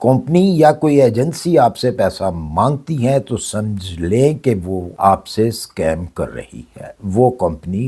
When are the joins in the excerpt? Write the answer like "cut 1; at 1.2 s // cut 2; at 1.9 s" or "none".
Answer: none